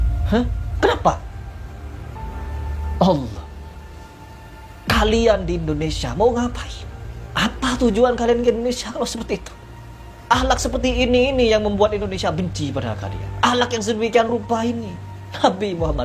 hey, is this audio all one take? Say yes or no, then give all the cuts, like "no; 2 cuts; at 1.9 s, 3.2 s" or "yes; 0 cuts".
yes; 0 cuts